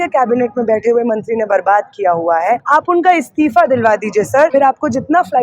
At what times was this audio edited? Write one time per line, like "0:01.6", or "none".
0:02.6
0:04.5